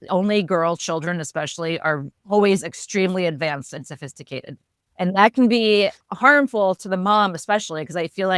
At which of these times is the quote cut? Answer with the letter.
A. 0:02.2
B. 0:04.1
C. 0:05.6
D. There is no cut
A